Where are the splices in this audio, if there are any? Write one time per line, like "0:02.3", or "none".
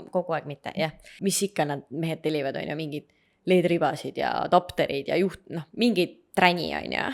0:01.1